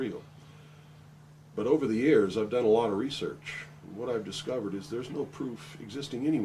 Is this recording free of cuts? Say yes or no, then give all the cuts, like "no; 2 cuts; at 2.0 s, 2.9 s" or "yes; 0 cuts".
no; 1 cut; at 2.3 s